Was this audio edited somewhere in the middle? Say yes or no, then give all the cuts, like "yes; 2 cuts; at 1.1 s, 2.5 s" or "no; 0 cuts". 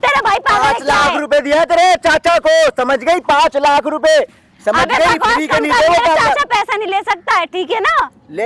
no; 0 cuts